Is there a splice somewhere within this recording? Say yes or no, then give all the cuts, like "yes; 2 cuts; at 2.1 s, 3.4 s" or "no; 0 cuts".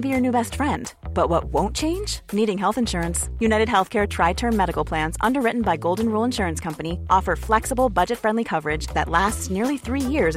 no; 0 cuts